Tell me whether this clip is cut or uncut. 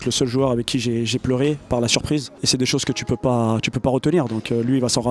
uncut